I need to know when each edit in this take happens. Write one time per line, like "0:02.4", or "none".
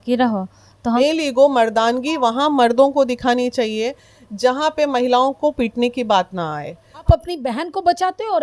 0:01.0
0:07.1

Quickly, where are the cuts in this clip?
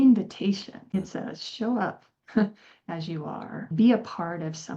0:00.9

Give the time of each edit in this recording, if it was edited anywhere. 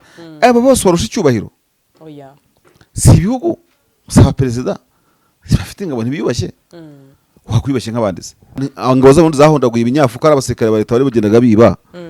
0:08.7

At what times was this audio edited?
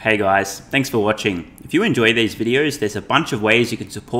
none

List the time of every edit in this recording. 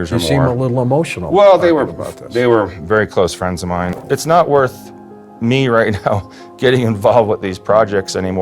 0:04.0

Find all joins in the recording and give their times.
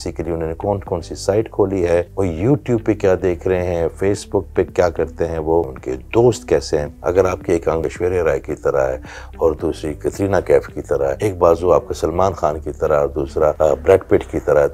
0:02.1
0:05.8
0:06.9
0:07.8
0:11.2
0:13.6

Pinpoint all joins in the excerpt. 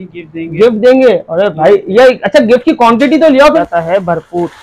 0:03.6

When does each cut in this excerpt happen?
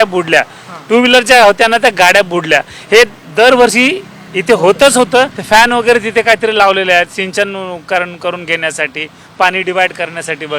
0:05.4

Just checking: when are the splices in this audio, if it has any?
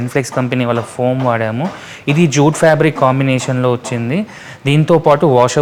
none

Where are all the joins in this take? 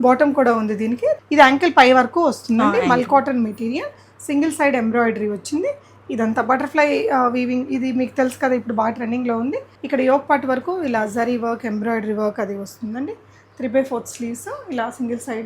0:01.2
0:09.7

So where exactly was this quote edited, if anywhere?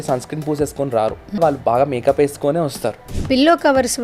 0:01.4
0:03.1

